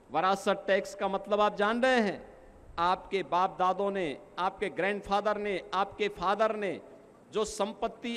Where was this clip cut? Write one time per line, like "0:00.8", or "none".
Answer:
none